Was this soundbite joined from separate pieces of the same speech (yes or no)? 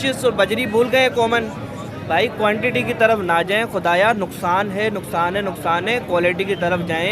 no